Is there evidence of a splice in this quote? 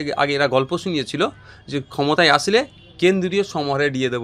no; 0 cuts

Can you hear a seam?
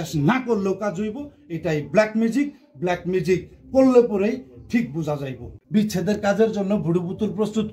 yes; 1 cut; at 5.5 s

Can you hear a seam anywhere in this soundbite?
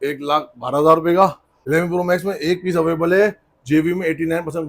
yes; 1 cut; at 1.5 s

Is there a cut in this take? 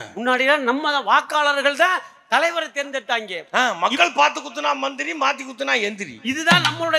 no; 0 cuts

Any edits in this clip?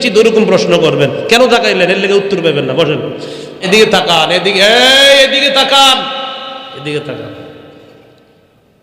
yes; 1 cut; at 3.6 s

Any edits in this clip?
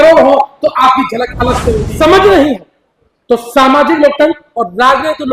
yes; 1 cut; at 1.8 s

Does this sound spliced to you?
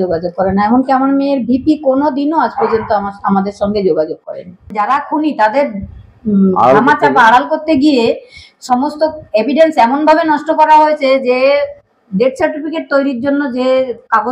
yes; 1 cut; at 4.7 s

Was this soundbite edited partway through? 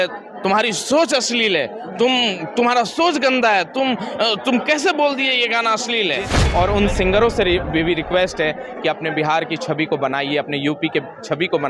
yes; 1 cut; at 6.4 s

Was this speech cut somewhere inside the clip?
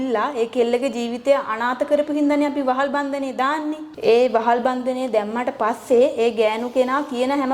no; 0 cuts

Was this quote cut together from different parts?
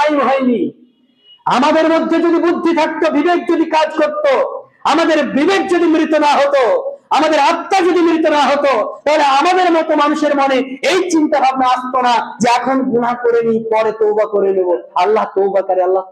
no; 0 cuts

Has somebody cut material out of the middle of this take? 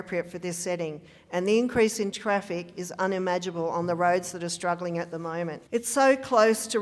yes; 1 cut; at 5.6 s

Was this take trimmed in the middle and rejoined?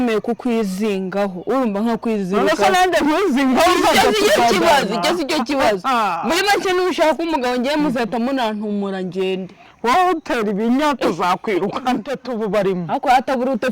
yes; 1 cut; at 12.2 s

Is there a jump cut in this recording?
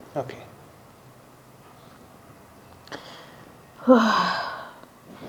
no; 0 cuts

